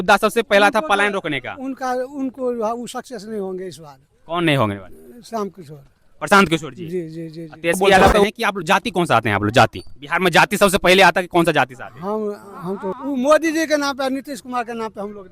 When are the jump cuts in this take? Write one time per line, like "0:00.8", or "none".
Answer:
0:08.2
0:12.9